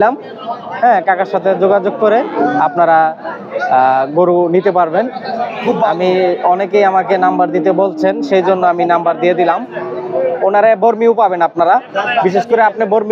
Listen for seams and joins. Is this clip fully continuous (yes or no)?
yes